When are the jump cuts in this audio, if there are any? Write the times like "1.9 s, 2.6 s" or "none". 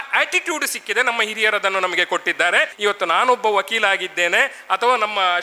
2.7 s